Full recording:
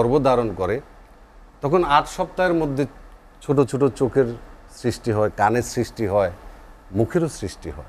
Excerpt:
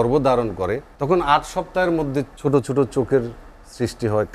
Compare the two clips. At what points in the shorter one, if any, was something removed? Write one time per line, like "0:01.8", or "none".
0:00.9
0:02.3